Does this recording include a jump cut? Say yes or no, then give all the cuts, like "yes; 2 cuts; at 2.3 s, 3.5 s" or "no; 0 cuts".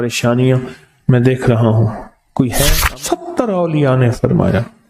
yes; 1 cut; at 2.8 s